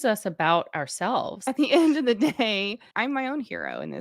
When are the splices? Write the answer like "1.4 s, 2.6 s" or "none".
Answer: 1.4 s, 2.8 s